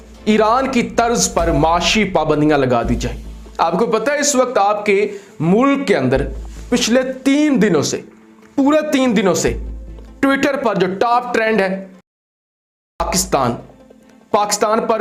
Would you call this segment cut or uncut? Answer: uncut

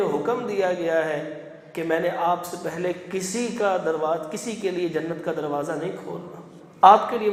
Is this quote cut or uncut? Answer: uncut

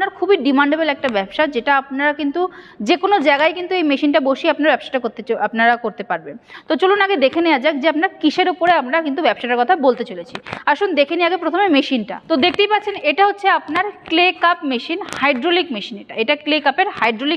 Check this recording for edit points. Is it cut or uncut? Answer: uncut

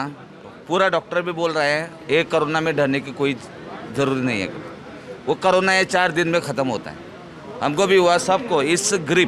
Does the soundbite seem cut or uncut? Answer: uncut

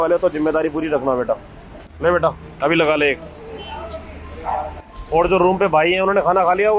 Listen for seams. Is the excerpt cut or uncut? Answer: cut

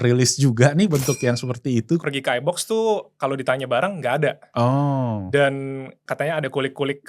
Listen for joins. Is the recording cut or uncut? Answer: cut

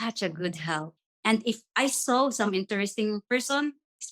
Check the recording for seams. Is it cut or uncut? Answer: cut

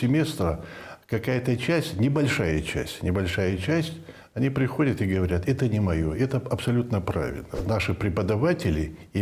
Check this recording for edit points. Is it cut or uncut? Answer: cut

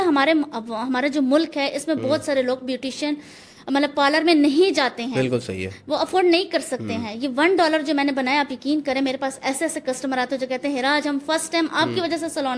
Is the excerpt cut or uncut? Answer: uncut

